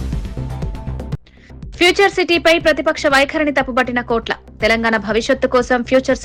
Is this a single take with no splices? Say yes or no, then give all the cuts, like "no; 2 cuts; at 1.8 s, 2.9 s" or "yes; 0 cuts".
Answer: yes; 0 cuts